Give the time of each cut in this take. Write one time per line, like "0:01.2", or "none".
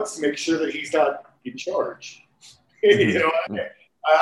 none